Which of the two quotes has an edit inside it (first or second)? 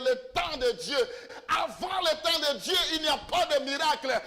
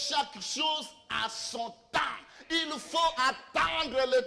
first